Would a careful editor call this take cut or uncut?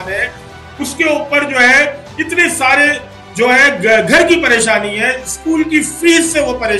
uncut